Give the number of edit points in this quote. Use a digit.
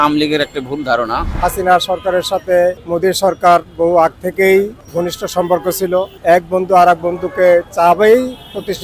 4